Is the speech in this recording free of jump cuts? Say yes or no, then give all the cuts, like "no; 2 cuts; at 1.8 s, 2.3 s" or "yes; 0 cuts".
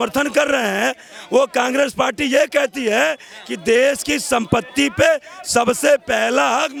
yes; 0 cuts